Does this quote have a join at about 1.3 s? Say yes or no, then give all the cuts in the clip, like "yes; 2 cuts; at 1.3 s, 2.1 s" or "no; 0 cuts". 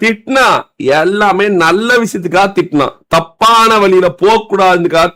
no; 0 cuts